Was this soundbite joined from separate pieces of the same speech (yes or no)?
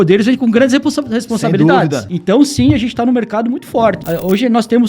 yes